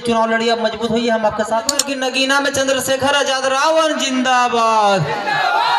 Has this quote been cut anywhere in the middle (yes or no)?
yes